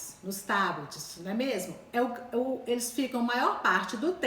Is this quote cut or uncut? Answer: uncut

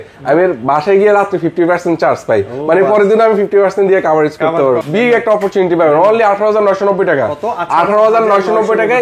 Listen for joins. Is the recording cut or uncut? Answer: cut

